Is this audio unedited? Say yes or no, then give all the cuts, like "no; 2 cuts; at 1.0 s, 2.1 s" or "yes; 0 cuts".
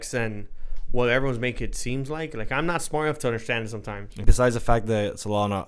no; 1 cut; at 4.2 s